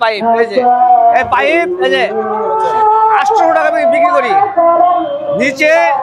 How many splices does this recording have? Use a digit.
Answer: 1